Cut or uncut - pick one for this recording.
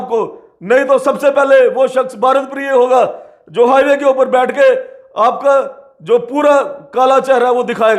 uncut